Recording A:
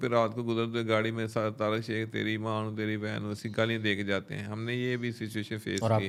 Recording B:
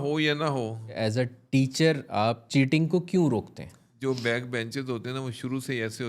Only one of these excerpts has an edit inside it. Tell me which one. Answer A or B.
B